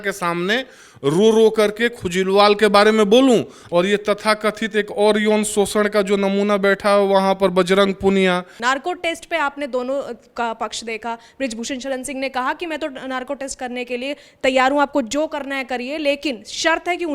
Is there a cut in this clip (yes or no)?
yes